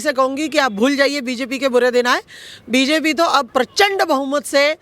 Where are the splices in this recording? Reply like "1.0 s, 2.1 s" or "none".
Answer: 3.5 s